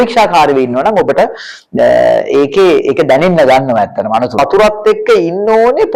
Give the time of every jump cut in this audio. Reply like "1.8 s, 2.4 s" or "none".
4.4 s